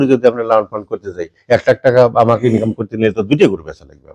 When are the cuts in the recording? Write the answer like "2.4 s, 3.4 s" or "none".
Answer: none